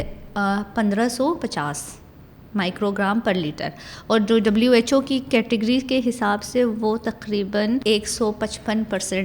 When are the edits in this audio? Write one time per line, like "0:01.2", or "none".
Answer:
0:07.8